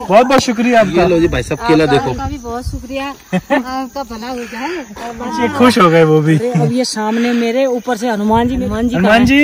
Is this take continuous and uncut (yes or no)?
no